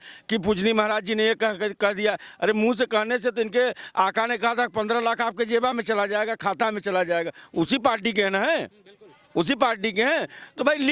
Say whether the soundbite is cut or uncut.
uncut